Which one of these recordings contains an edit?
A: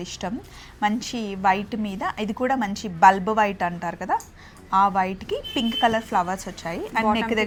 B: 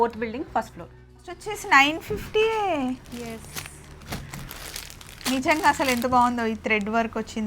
B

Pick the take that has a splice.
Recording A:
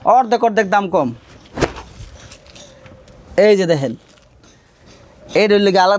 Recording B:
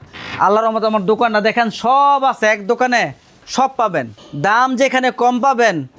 B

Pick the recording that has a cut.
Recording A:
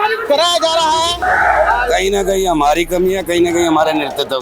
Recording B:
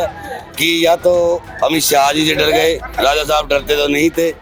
A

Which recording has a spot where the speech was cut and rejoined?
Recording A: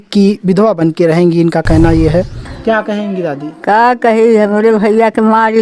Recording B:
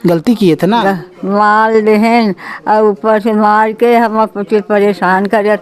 A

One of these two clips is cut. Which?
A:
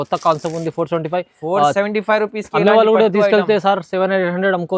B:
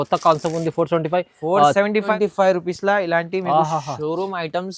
B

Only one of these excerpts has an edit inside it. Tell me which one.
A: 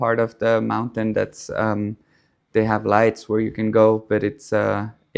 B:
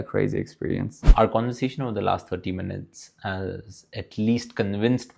B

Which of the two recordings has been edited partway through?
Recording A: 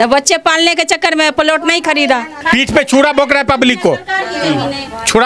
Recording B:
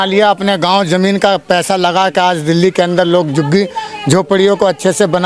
A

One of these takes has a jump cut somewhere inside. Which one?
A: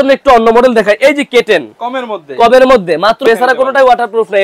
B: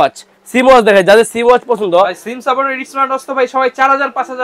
A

